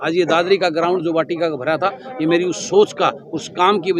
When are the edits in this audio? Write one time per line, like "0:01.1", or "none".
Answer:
none